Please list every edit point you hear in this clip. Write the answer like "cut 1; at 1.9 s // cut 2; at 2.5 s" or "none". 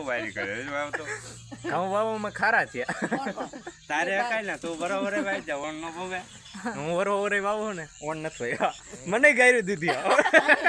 none